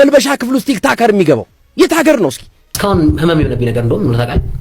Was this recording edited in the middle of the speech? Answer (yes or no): yes